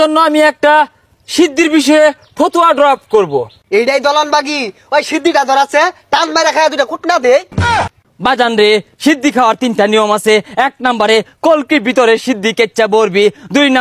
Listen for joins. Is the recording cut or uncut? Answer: cut